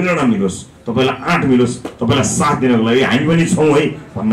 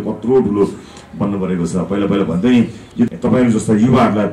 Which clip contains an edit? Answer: second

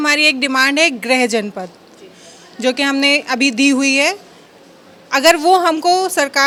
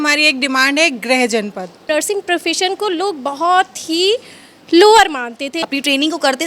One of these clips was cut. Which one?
second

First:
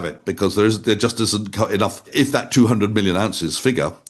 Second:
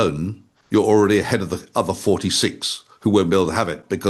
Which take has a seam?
first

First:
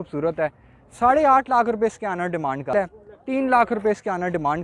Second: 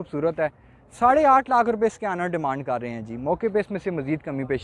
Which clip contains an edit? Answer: first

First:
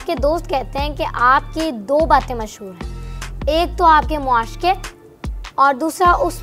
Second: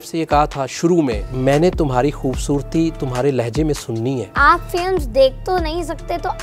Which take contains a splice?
second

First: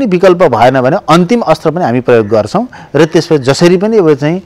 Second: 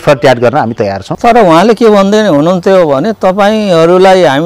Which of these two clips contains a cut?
second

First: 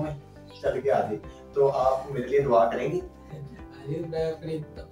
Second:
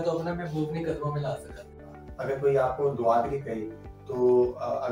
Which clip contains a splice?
second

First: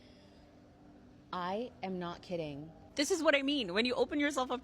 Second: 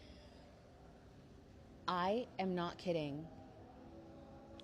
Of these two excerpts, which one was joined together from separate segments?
first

